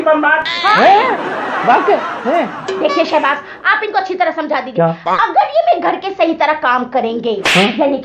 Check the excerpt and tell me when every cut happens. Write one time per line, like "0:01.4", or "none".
0:02.5